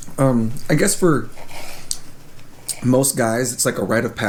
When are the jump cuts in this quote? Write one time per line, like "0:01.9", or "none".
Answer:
none